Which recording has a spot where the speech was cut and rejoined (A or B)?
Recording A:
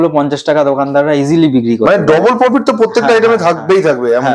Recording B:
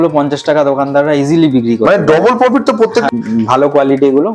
B